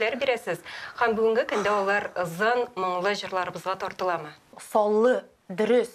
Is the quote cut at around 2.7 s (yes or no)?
no